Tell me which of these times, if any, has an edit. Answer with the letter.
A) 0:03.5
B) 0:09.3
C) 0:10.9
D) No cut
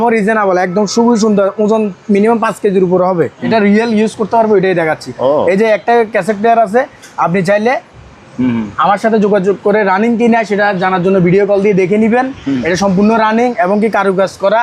A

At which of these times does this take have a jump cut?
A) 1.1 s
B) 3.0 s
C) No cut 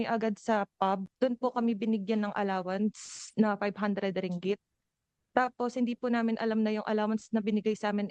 A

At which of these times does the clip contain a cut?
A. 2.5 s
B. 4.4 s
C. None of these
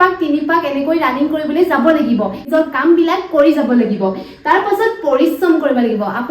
A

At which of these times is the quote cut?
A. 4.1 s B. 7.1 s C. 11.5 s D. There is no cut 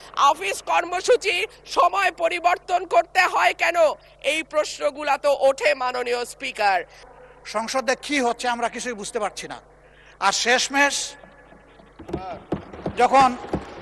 B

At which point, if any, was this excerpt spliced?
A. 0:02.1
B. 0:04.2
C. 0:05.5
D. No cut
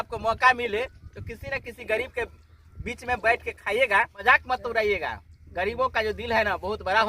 B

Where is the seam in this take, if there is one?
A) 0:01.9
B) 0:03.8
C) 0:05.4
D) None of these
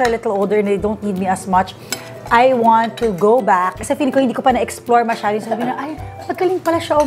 B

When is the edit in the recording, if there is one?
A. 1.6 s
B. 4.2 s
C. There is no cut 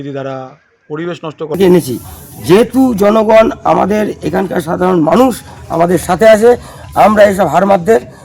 A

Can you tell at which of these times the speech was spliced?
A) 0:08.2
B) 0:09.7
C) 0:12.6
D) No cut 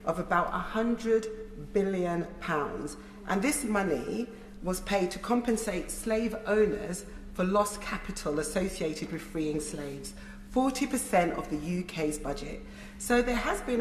D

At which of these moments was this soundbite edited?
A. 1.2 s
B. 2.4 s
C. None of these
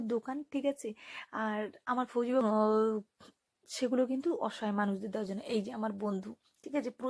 B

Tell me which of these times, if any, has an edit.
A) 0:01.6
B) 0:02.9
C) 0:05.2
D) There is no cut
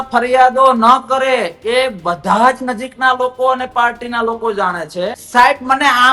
C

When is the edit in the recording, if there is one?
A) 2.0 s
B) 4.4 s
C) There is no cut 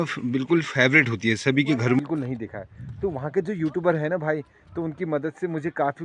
A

